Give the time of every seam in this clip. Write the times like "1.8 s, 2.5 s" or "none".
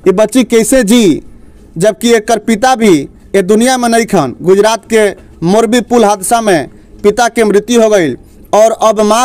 none

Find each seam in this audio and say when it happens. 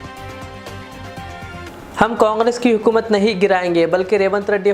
1.6 s

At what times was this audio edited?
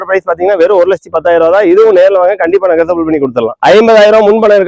3.6 s

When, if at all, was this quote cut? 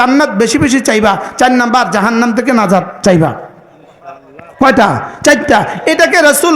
none

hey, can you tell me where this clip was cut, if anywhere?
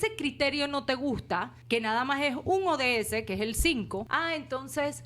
1.5 s, 4.1 s

